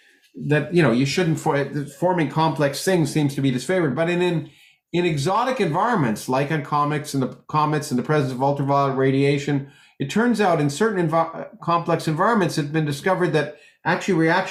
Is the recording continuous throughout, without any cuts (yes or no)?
yes